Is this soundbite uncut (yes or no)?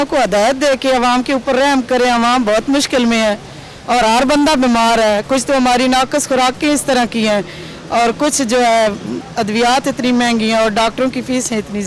yes